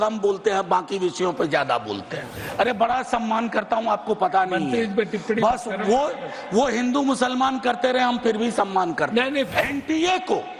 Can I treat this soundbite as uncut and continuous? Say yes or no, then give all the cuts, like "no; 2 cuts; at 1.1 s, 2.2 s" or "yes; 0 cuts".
no; 2 cuts; at 2.4 s, 9.5 s